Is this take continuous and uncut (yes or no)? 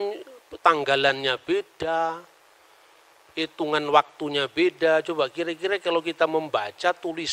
yes